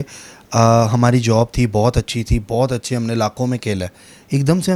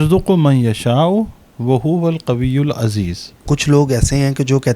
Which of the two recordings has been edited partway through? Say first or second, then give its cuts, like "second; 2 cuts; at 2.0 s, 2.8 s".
second; 1 cut; at 3.4 s